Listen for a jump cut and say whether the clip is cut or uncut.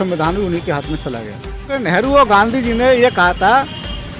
cut